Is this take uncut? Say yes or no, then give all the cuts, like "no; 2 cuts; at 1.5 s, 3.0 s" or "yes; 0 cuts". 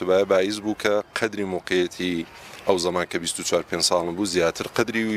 yes; 0 cuts